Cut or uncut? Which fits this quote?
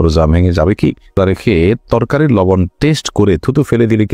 cut